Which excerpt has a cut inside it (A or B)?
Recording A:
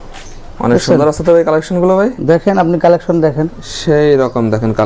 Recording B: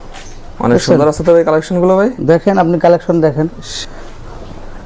B